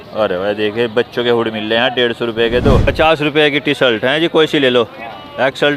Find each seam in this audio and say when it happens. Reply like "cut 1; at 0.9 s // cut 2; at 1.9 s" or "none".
cut 1; at 2.9 s